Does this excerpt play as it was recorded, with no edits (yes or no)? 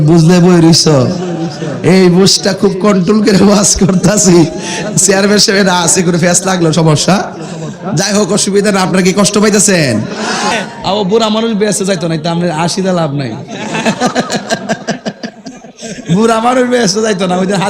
no